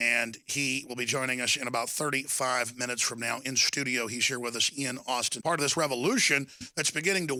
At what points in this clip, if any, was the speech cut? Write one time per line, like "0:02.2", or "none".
none

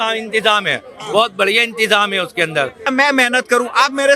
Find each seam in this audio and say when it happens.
0:02.9

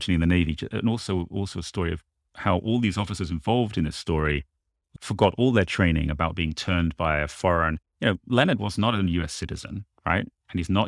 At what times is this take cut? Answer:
none

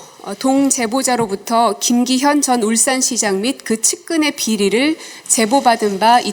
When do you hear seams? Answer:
none

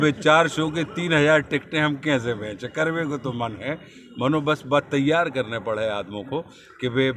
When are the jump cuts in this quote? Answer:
none

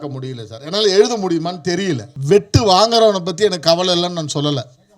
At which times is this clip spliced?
0:02.1

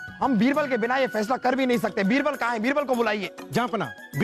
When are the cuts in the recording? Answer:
none

